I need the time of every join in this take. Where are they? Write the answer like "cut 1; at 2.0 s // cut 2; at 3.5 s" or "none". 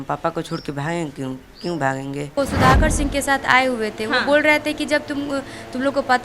cut 1; at 2.4 s